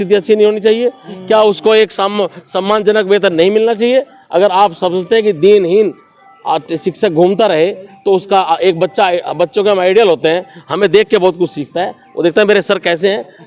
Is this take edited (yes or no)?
no